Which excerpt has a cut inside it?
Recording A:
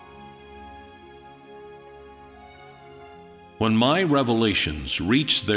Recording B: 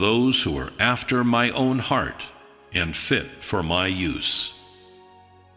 A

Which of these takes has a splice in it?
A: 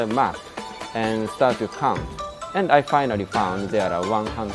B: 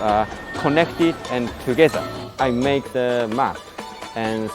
B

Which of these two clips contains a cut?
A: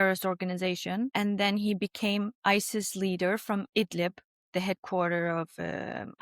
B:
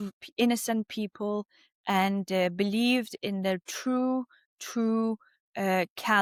A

